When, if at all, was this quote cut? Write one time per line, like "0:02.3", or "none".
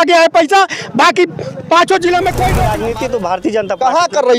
0:02.7